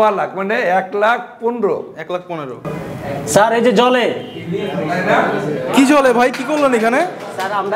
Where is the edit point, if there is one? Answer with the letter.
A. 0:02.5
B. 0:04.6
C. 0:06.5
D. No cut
A